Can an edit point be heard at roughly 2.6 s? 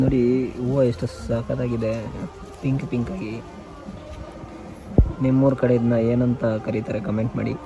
no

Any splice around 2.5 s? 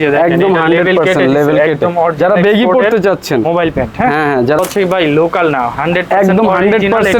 no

